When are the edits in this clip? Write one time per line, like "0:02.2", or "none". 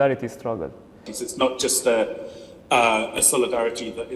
0:01.1